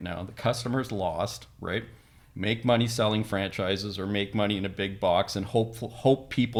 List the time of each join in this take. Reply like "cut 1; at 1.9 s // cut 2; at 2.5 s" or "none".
none